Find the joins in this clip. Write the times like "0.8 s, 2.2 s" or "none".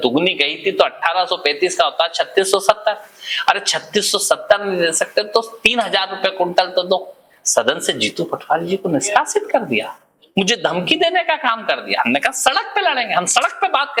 none